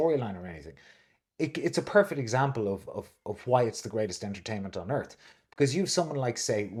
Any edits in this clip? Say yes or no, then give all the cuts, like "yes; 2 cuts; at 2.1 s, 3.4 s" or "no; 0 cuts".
no; 0 cuts